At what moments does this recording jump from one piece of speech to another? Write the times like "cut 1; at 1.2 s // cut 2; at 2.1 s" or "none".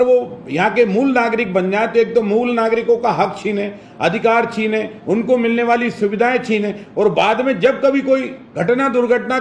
none